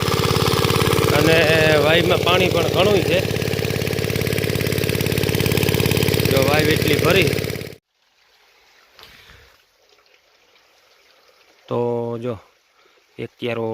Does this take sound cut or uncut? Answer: cut